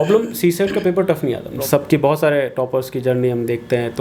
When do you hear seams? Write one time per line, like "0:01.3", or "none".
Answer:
0:01.5